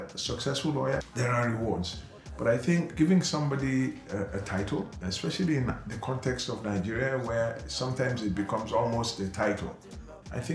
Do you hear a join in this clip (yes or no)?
yes